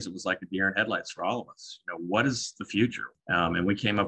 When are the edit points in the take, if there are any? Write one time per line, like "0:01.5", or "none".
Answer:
0:03.1